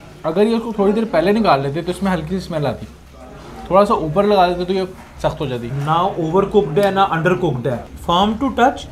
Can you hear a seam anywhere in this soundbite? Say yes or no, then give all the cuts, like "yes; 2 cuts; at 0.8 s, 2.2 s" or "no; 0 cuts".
no; 0 cuts